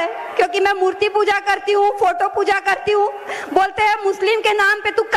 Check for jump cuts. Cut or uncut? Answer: uncut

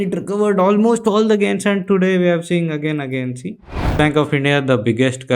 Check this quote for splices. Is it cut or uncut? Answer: cut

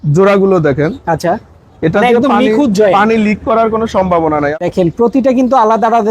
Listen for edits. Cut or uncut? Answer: cut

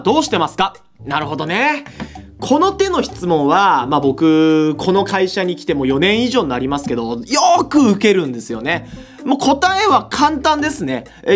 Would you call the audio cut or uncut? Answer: uncut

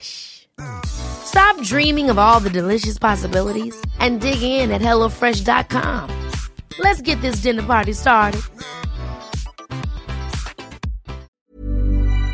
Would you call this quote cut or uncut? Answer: cut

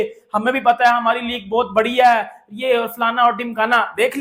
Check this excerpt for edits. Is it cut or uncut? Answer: uncut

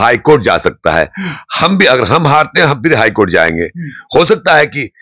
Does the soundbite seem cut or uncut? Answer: uncut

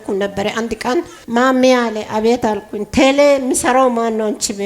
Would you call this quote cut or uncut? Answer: cut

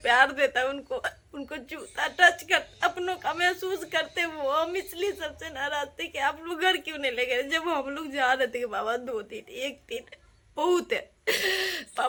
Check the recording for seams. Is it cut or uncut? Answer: uncut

